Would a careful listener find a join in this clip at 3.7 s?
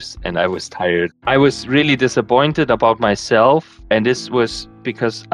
yes; 2 cuts; at 1.2 s, 3.7 s

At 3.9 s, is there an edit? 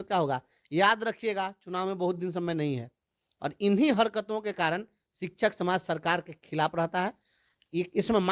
no; 0 cuts

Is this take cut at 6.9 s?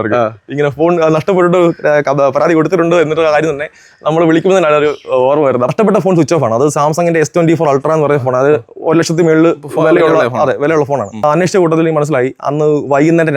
no; 2 cuts; at 5.7 s, 11.2 s

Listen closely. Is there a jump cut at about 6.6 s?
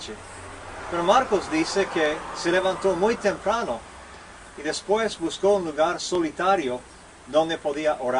yes; 1 cut; at 6.6 s

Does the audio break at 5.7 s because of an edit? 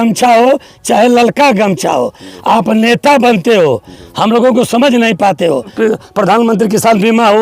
yes; 1 cut; at 5.7 s

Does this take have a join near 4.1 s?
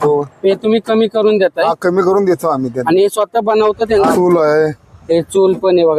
yes; 1 cut; at 4.1 s

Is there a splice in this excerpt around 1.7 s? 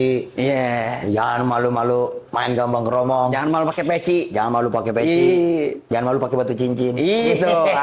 no; 0 cuts

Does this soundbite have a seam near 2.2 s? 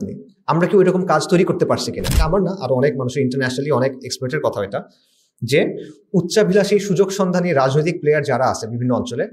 yes; 1 cut; at 2.2 s

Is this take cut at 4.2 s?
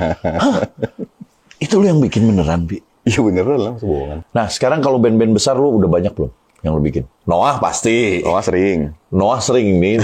yes; 2 cuts; at 4.2 s, 7.1 s

